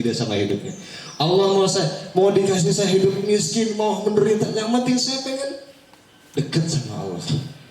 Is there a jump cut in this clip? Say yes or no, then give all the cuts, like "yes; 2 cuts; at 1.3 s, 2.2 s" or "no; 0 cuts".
no; 0 cuts